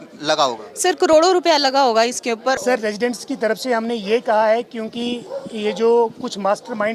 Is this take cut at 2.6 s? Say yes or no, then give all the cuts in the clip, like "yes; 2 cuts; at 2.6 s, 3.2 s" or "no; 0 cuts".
yes; 1 cut; at 2.6 s